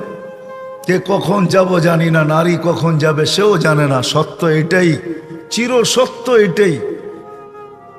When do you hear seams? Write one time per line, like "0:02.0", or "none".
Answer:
none